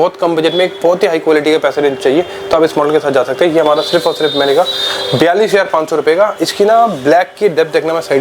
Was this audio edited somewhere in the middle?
no; 0 cuts

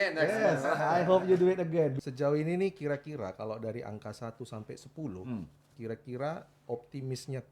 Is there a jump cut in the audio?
yes; 1 cut; at 2.0 s

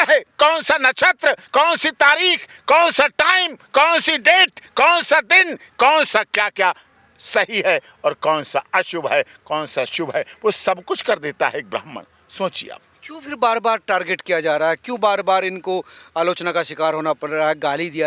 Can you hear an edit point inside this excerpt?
no; 0 cuts

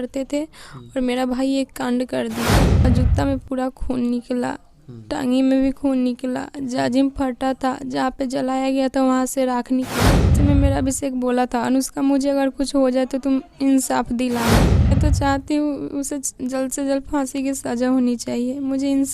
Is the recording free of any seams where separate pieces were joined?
no; 3 cuts; at 2.9 s, 10.3 s, 14.9 s

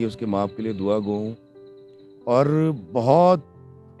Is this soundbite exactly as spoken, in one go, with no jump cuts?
yes; 0 cuts

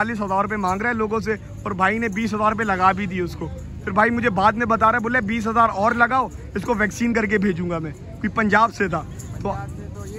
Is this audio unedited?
yes; 0 cuts

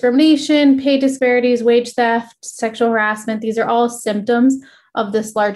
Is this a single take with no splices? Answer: no; 1 cut; at 1.2 s

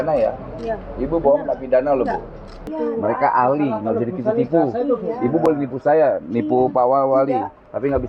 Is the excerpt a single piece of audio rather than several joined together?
no; 1 cut; at 2.7 s

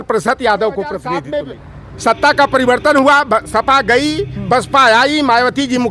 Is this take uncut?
no; 1 cut; at 1.2 s

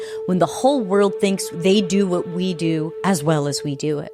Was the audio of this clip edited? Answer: yes; 2 cuts; at 1.5 s, 2.9 s

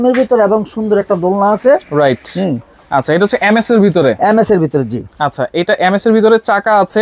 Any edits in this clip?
no; 0 cuts

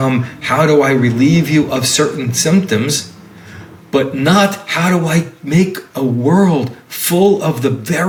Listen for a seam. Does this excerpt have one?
no; 0 cuts

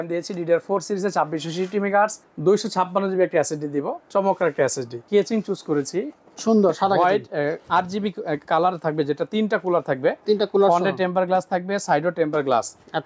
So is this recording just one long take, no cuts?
no; 2 cuts; at 2.3 s, 5.0 s

